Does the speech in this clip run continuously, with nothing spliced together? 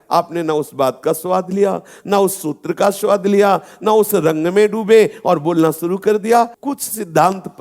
no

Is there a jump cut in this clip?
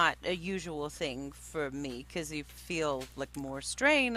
no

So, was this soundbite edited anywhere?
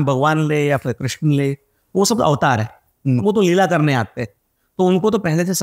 no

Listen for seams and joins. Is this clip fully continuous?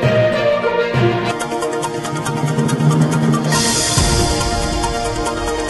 yes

